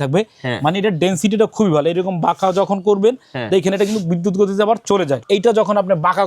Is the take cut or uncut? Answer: cut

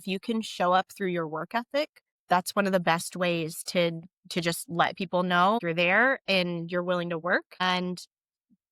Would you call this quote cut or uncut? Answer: cut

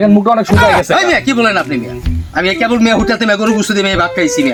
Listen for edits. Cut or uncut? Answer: uncut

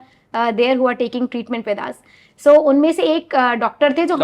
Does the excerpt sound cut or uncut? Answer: uncut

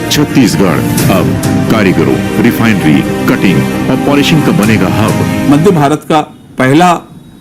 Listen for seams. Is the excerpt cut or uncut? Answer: cut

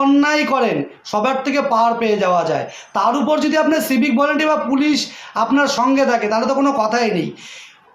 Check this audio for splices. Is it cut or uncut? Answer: uncut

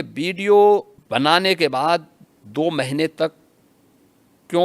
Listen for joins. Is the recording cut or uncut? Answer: cut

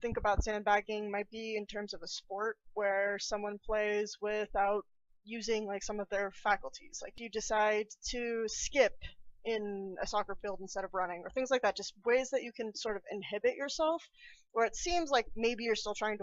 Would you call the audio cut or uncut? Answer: uncut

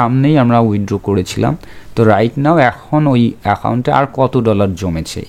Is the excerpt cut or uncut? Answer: uncut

